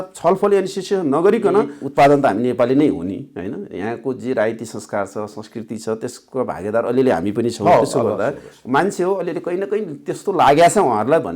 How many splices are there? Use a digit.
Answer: 1